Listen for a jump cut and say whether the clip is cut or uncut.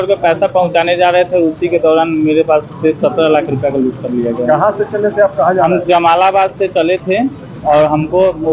uncut